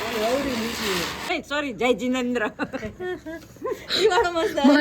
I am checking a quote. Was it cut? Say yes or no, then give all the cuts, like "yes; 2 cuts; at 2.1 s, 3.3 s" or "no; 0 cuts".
yes; 1 cut; at 1.2 s